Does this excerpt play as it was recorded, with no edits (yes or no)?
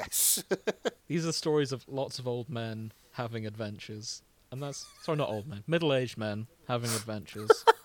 no